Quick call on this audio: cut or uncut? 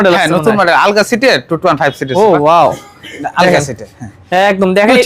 uncut